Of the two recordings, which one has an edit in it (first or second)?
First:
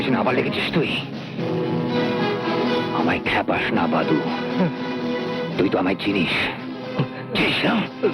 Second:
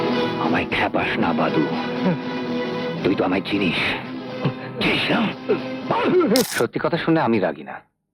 second